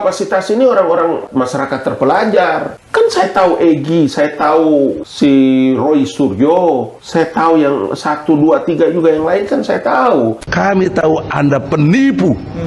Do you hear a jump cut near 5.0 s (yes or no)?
yes